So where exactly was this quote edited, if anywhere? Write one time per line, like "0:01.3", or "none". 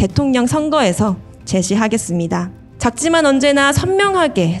0:02.6